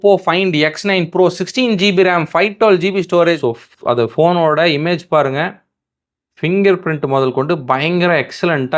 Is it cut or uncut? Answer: cut